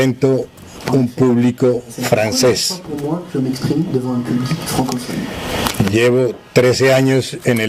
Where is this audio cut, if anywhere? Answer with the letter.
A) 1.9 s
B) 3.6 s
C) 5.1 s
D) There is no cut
B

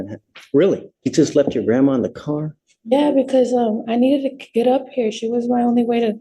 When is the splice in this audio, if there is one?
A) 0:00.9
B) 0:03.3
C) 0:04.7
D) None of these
A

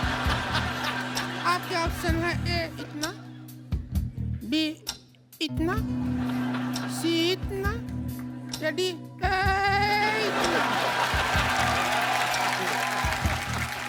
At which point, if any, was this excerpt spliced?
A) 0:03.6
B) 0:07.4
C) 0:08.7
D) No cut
D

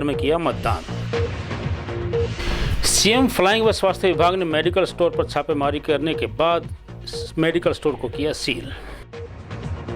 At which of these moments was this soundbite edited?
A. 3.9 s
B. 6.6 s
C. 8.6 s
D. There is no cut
C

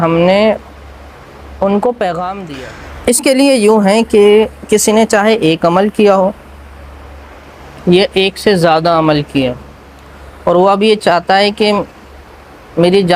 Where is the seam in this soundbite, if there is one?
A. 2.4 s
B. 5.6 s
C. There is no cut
A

